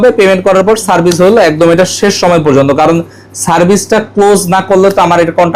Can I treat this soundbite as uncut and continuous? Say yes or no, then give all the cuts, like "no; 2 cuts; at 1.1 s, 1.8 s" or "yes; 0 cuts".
yes; 0 cuts